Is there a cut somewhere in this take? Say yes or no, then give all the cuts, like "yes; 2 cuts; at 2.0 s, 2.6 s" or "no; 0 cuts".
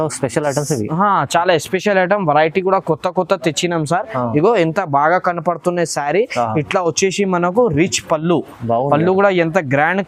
no; 0 cuts